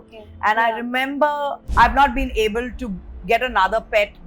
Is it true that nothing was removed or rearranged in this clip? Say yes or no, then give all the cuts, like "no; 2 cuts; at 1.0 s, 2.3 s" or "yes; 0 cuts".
no; 1 cut; at 1.6 s